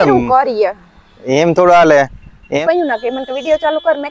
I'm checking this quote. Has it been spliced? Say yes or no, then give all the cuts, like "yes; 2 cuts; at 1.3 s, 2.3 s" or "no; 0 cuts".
yes; 1 cut; at 2.5 s